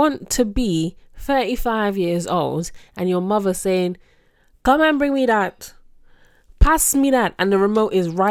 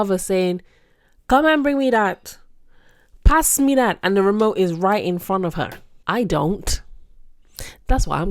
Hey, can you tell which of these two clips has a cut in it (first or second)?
second